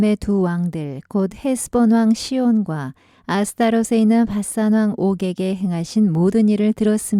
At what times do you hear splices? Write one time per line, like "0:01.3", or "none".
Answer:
none